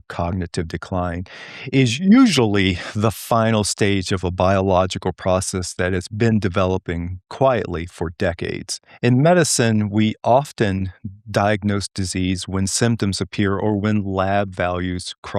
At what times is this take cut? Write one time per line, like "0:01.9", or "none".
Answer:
none

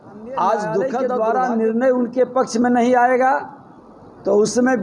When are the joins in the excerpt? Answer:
0:01.0

